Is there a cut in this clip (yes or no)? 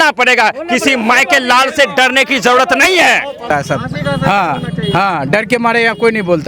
no